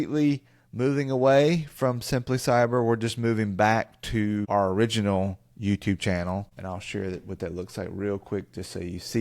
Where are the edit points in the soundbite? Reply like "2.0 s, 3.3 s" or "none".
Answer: 4.4 s, 6.5 s